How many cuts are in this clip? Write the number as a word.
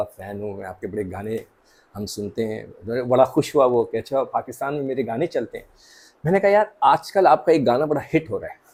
zero